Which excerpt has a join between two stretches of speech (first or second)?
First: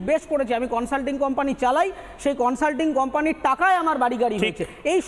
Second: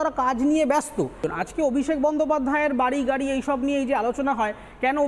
second